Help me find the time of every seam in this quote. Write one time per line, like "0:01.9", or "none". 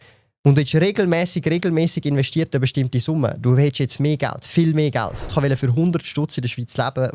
0:05.3